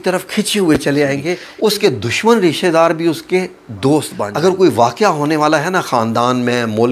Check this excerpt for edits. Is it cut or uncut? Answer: cut